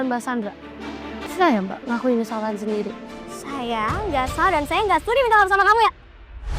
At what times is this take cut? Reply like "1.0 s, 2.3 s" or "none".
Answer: 1.2 s